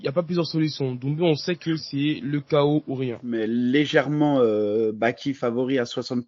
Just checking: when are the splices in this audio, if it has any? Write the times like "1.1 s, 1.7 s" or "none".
3.3 s

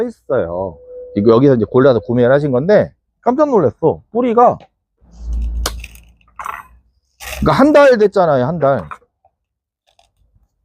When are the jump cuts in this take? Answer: 3.0 s, 5.2 s

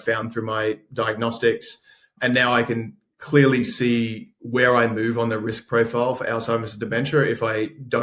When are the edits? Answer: none

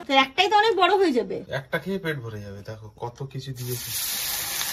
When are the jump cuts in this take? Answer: 1.5 s

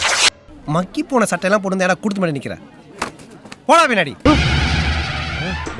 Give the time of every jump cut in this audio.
4.1 s

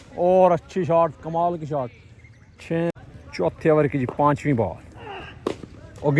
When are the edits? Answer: 2.9 s

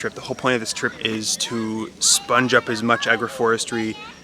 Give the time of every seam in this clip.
1.0 s

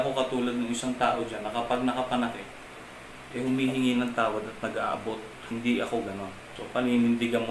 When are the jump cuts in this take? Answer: none

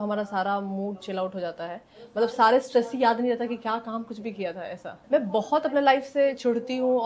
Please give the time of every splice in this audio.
4.9 s

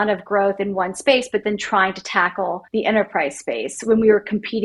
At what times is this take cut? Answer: 2.6 s

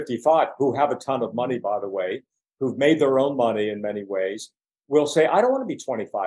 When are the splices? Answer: none

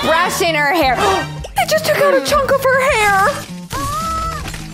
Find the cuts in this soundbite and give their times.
1.4 s

